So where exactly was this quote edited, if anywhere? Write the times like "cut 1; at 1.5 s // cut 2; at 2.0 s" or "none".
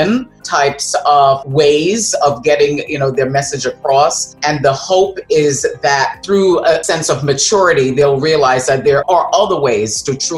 cut 1; at 4.4 s // cut 2; at 6.8 s // cut 3; at 9.0 s